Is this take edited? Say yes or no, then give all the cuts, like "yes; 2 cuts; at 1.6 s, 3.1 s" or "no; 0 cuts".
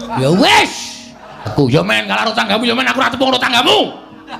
yes; 1 cut; at 1.5 s